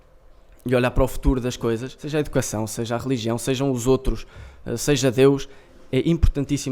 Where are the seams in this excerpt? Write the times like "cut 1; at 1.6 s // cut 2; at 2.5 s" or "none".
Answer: cut 1; at 1.9 s